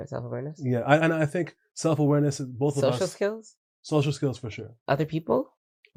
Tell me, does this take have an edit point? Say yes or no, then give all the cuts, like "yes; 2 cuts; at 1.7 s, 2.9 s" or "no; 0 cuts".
no; 0 cuts